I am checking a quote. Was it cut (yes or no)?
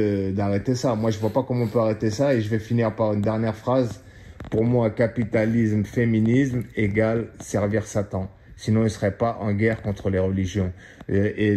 no